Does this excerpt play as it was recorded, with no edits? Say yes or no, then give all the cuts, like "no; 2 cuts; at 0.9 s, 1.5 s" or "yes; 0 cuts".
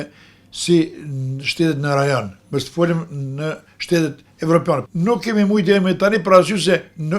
no; 1 cut; at 4.9 s